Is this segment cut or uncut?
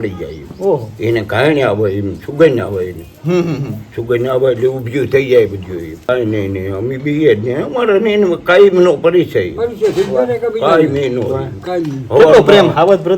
cut